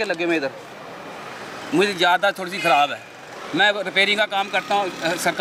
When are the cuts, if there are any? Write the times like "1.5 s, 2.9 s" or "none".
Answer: none